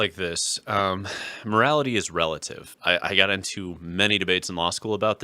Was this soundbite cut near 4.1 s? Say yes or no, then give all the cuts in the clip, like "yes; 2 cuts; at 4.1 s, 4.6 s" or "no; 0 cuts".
no; 1 cut; at 2.8 s